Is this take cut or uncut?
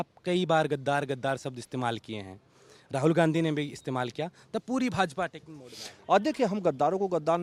uncut